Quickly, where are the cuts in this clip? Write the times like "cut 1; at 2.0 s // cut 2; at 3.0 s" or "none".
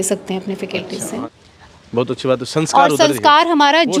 cut 1; at 1.2 s

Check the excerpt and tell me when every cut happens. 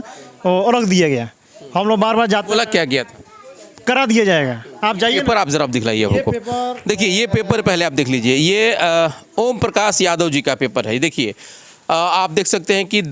none

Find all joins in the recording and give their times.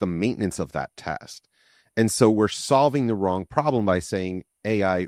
none

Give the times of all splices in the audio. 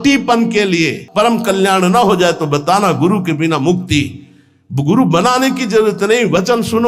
cut 1; at 1.0 s

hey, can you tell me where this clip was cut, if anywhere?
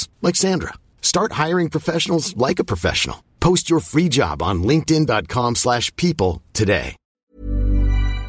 cut 1; at 7.1 s

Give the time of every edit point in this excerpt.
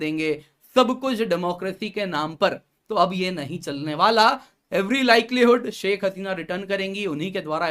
none

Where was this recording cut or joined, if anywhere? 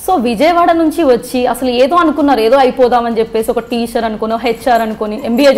none

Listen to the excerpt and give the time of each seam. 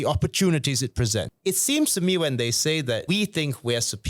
cut 1; at 1.3 s // cut 2; at 3.0 s

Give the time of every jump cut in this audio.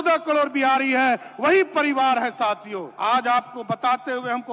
cut 1; at 2.8 s

